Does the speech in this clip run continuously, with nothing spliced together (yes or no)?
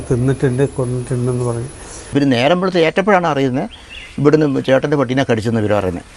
no